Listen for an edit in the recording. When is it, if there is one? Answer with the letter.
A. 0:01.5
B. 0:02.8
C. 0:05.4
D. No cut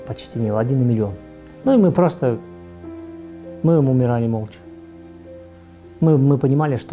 A